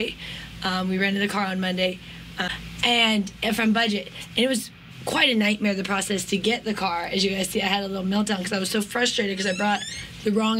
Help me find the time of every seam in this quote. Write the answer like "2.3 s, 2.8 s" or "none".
2.5 s